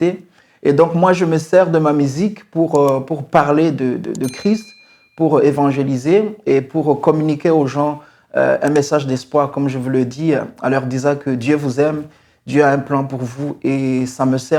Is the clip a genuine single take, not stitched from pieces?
yes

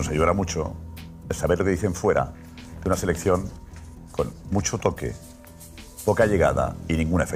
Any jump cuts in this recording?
no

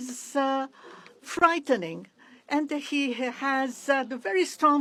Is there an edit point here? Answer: no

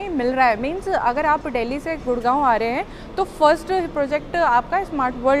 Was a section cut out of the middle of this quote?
no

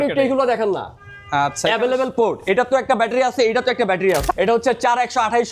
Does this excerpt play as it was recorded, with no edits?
no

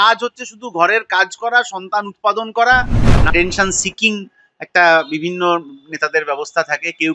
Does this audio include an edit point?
yes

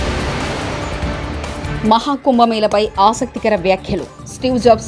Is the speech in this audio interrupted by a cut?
yes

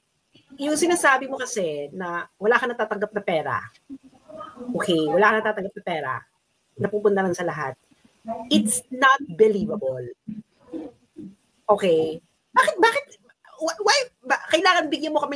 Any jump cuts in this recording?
no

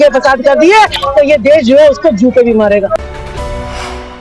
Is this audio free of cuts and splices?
no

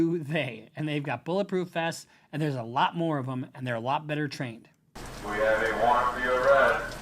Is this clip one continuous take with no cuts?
no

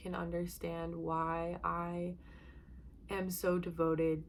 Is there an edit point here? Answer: no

